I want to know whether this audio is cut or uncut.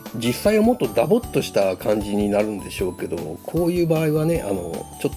uncut